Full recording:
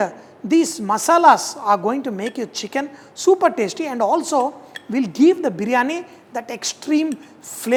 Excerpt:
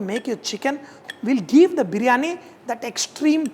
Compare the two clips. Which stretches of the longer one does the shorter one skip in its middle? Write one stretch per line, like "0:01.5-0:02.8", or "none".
0:03.1-0:04.6